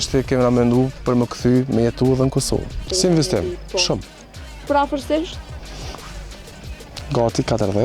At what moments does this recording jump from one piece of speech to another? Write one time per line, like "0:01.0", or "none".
0:02.8